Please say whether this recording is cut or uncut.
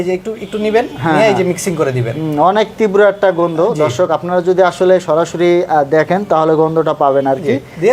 uncut